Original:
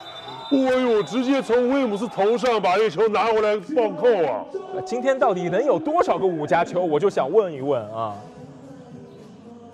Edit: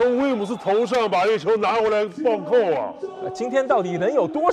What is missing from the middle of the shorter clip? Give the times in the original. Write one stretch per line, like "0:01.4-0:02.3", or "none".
none